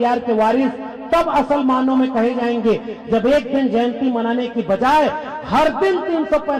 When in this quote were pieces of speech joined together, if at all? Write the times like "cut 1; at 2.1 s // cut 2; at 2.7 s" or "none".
none